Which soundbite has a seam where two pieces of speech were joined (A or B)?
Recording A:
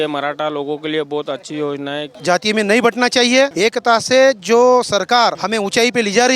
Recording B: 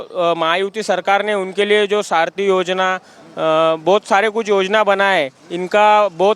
A